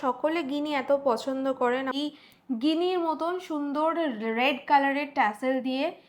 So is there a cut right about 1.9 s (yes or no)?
yes